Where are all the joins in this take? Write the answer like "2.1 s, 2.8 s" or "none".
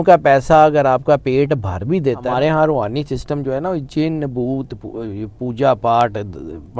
2.2 s